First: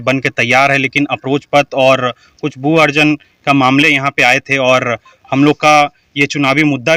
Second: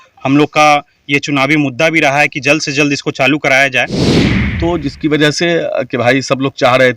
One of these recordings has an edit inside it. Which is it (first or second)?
second